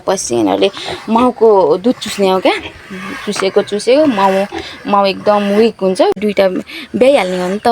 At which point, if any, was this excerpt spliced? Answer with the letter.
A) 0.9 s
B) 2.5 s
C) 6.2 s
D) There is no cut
C